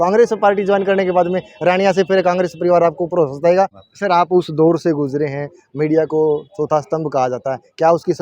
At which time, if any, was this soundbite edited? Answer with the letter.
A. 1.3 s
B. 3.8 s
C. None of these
B